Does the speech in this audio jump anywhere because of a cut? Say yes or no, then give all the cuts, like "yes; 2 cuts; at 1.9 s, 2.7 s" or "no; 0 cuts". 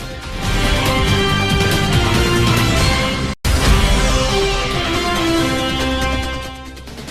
yes; 1 cut; at 3.4 s